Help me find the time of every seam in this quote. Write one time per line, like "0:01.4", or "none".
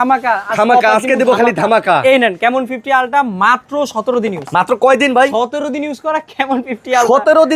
none

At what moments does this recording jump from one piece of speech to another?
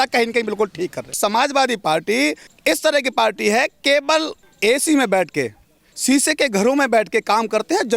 0:01.2
0:02.5
0:04.4

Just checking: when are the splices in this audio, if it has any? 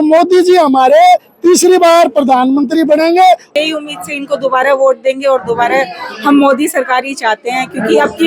0:03.5

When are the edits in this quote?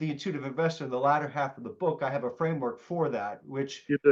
none

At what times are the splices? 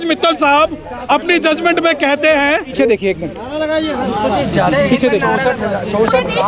0:02.7

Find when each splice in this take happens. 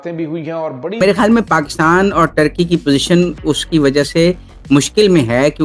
0:01.0

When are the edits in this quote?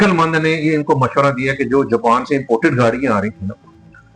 none

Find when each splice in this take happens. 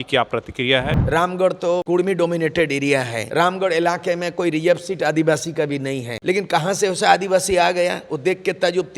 0:01.0
0:01.8
0:03.2
0:06.1

